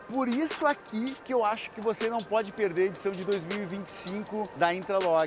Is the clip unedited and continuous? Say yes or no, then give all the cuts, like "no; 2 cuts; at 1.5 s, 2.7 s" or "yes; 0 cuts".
no; 2 cuts; at 1.2 s, 4.5 s